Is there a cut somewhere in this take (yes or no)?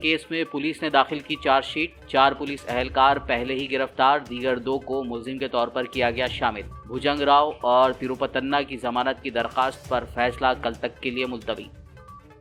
no